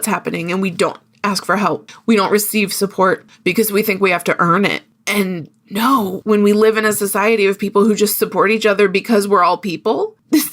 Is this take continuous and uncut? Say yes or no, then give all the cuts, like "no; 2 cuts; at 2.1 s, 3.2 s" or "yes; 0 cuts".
no; 2 cuts; at 1.8 s, 6.2 s